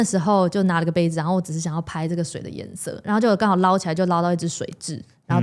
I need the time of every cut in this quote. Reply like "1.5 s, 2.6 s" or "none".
none